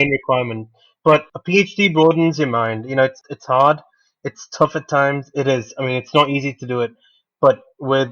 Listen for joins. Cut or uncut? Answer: cut